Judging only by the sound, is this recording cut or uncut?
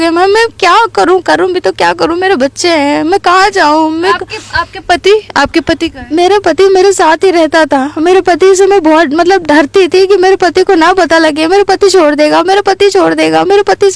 uncut